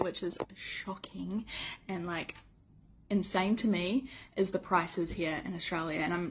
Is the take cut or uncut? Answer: uncut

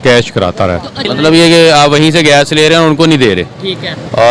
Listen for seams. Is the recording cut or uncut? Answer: cut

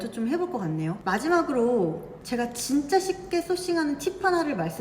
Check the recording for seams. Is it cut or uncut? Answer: cut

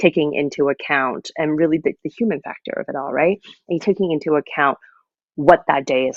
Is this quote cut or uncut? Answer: uncut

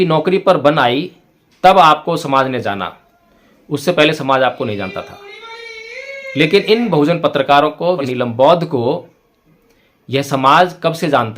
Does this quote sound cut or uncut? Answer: cut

